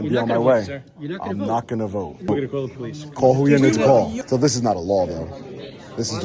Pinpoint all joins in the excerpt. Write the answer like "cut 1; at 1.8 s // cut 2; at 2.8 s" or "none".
cut 1; at 2.3 s // cut 2; at 4.2 s

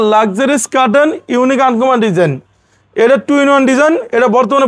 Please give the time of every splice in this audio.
none

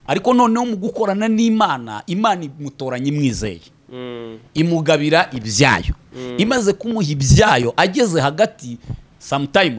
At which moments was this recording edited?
none

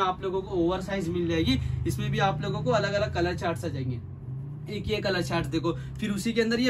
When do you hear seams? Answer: none

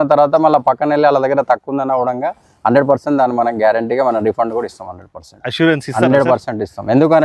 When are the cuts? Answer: none

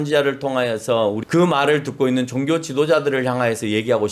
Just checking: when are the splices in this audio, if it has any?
cut 1; at 1.2 s

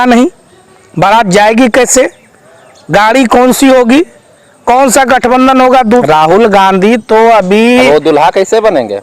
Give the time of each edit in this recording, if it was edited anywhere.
cut 1; at 6.0 s

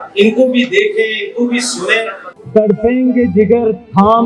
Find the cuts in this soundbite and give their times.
cut 1; at 2.2 s

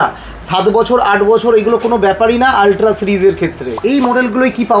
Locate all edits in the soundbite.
cut 1; at 3.8 s

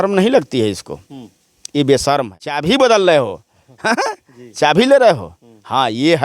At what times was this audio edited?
cut 1; at 2.6 s

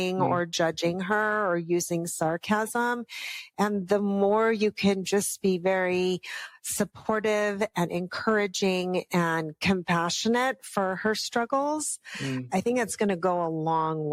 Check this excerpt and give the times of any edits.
none

